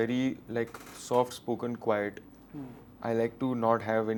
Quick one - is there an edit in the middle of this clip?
no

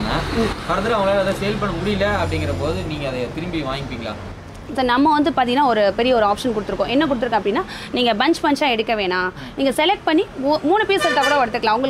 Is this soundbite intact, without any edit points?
yes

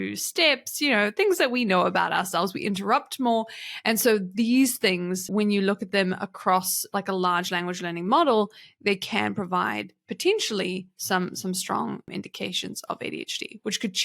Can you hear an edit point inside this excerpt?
yes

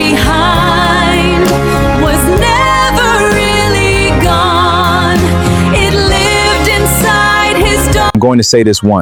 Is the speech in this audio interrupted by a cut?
no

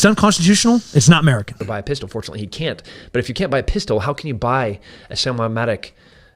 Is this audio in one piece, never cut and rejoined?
yes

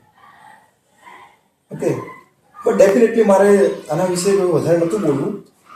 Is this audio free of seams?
yes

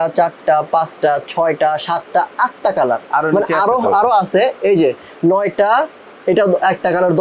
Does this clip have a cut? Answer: no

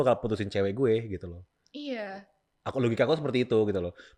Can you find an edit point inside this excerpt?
no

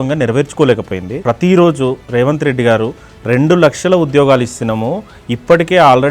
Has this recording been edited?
yes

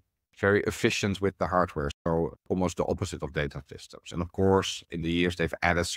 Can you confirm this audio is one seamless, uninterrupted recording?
yes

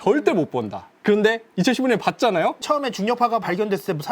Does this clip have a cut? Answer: yes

